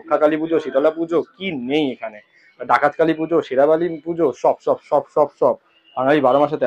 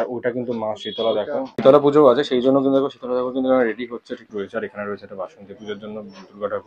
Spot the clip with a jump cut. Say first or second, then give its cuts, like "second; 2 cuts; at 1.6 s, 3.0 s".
second; 2 cuts; at 1.5 s, 4.2 s